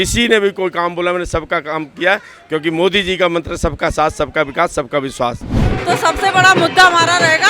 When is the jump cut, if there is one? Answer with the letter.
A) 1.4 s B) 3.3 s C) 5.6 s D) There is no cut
C